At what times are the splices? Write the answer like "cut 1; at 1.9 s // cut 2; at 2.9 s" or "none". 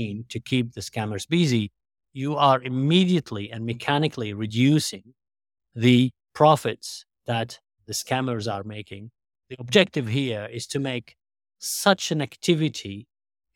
cut 1; at 7.7 s // cut 2; at 9.5 s